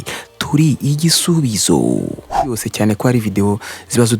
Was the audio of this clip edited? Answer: yes; 1 cut; at 2.6 s

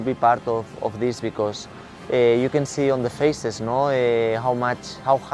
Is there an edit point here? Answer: no; 0 cuts

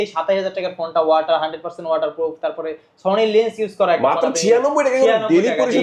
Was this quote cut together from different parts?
no; 0 cuts

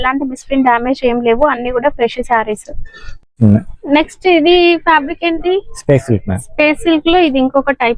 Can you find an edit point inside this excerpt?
no; 0 cuts

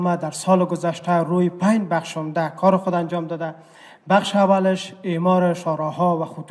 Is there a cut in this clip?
no; 0 cuts

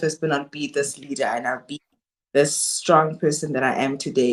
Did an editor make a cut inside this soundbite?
no; 0 cuts

